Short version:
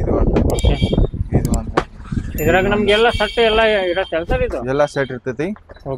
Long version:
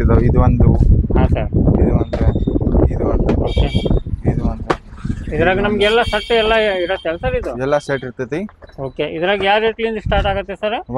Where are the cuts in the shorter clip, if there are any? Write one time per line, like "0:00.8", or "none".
none

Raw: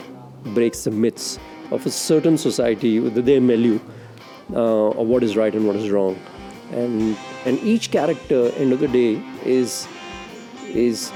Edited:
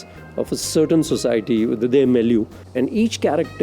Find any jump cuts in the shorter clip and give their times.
0:02.6

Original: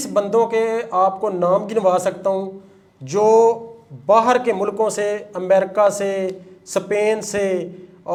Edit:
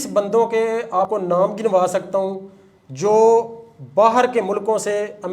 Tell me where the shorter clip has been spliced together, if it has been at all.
0:01.0

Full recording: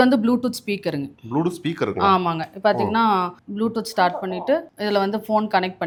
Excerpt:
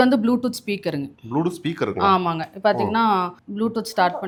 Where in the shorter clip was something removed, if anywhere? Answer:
none

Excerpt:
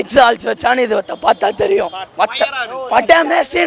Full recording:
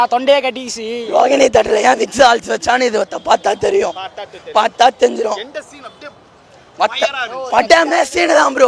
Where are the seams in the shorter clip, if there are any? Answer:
0:02.0

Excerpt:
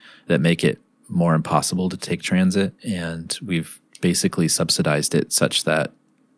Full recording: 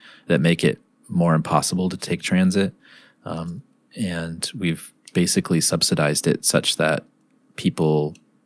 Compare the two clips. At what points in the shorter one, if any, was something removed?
0:02.8

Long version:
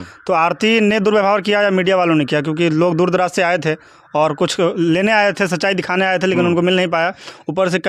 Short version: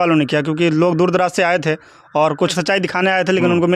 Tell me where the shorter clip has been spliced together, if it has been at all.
0:02.5

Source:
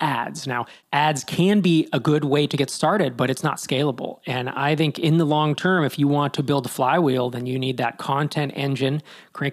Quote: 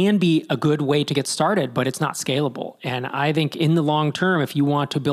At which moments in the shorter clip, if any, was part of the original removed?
none

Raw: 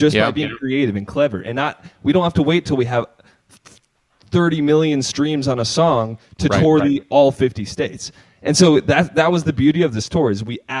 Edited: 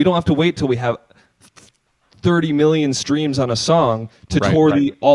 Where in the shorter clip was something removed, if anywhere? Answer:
none

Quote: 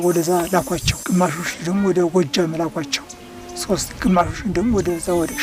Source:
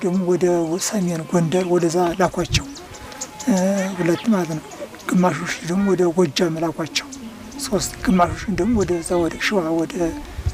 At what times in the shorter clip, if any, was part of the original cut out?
0:00.9

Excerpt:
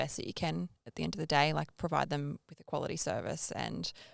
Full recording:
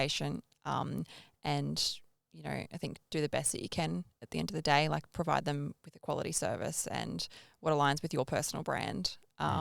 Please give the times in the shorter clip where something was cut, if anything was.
none

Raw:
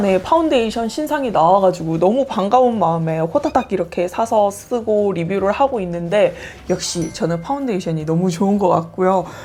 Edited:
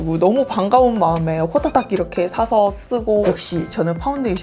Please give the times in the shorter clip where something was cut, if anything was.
0:03.2

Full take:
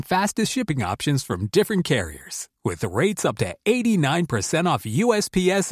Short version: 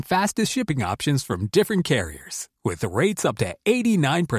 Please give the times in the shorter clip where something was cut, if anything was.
none

